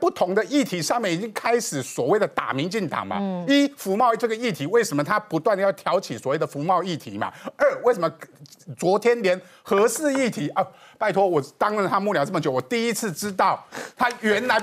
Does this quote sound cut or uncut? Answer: uncut